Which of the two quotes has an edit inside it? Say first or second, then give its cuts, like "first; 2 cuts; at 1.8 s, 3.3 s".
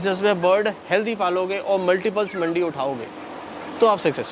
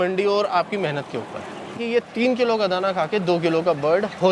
second; 1 cut; at 1.8 s